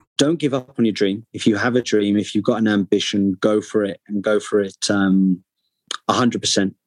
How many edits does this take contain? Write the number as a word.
one